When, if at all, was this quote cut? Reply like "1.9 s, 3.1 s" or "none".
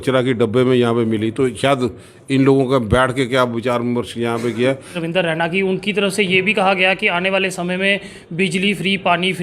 5.0 s